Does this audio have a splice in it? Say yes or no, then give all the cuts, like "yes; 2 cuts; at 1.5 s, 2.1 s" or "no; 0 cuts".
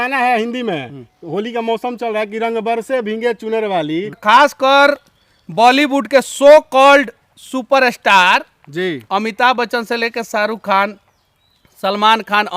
yes; 1 cut; at 4.2 s